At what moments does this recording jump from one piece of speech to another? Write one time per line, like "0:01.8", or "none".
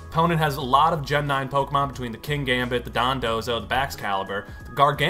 none